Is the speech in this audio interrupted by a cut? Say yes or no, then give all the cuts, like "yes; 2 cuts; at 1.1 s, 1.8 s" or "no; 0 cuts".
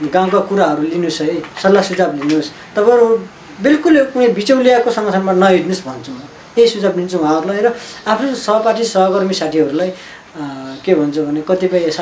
no; 0 cuts